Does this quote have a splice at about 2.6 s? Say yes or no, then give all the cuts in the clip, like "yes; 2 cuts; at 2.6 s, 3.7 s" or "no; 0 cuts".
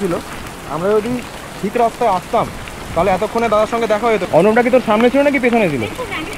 no; 1 cut; at 4.2 s